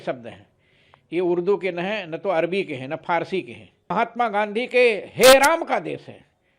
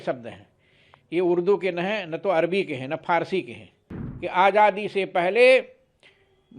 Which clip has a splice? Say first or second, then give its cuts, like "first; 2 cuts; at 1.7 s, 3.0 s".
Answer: second; 1 cut; at 3.8 s